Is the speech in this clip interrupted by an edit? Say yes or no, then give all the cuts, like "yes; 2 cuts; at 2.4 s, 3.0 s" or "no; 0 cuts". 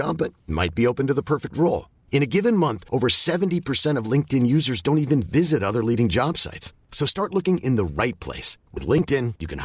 no; 0 cuts